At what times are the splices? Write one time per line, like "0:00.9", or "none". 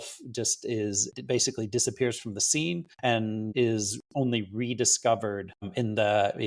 0:01.1
0:03.2
0:05.7